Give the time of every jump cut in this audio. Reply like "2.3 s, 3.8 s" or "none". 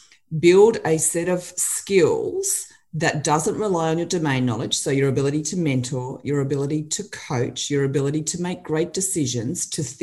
none